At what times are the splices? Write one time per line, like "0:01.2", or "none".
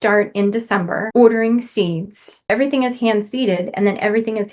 0:01.0
0:02.5